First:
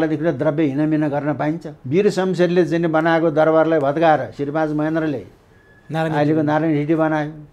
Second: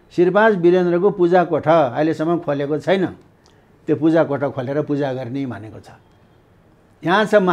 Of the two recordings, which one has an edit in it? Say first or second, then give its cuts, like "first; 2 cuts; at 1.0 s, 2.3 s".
first; 1 cut; at 1.7 s